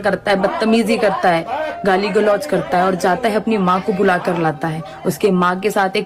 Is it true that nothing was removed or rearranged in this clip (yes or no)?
yes